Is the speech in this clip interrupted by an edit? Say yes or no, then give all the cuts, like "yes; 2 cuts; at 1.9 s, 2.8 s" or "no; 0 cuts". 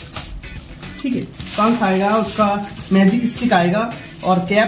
no; 0 cuts